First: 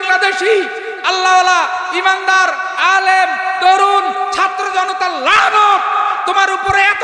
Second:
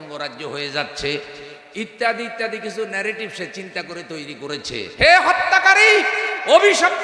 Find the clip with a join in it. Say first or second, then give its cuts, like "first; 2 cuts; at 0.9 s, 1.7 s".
second; 1 cut; at 4.8 s